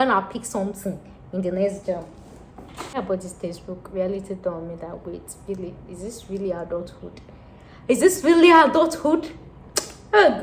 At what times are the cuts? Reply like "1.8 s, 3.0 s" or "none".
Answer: 2.9 s